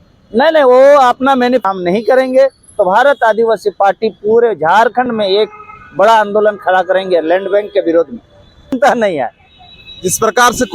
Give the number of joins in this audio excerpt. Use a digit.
2